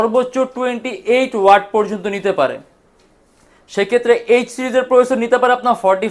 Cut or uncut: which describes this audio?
uncut